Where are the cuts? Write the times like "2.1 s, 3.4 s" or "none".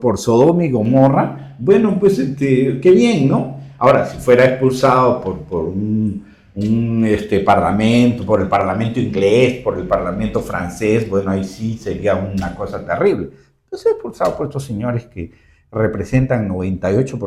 none